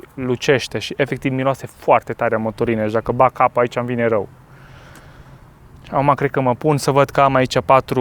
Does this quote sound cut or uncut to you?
uncut